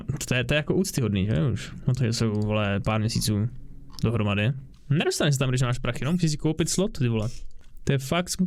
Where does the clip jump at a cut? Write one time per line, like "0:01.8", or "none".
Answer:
none